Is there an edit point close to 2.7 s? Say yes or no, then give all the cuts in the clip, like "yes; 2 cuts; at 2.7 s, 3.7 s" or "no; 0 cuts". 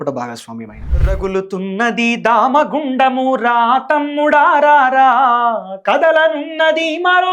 no; 1 cut; at 1.0 s